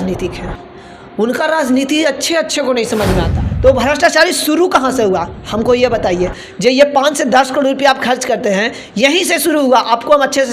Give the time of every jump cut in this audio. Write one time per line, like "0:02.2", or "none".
0:03.4

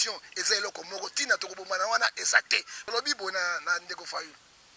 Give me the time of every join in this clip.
0:02.8

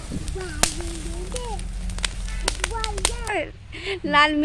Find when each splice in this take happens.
0:03.3

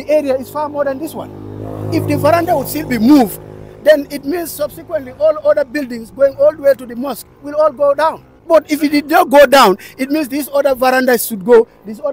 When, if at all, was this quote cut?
0:08.3

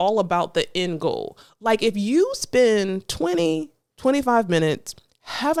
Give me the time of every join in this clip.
none

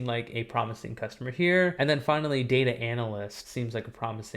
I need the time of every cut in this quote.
0:01.8
0:03.4

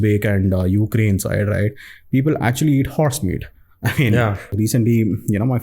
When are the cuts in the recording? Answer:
0:04.5

